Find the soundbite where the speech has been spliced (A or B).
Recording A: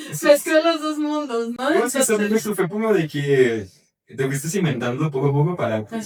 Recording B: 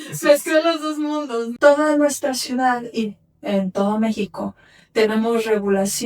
B